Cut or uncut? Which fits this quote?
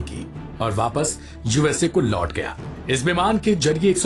uncut